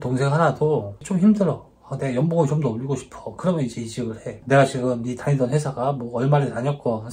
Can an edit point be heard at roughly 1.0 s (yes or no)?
yes